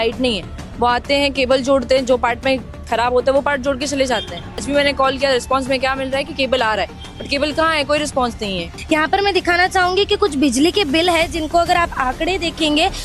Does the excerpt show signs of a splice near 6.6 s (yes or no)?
no